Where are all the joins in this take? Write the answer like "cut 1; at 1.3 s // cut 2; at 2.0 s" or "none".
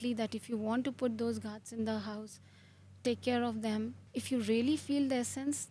cut 1; at 4.0 s